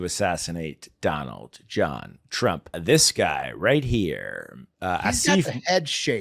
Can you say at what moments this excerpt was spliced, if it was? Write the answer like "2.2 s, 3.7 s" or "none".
2.8 s